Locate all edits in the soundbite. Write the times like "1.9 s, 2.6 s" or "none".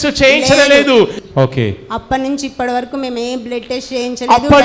1.2 s